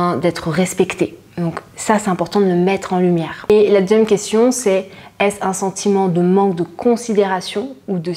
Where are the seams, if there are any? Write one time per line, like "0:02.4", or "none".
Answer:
0:03.5